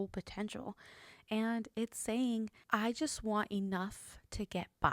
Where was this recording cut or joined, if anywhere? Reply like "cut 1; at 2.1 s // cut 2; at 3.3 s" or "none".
cut 1; at 2.6 s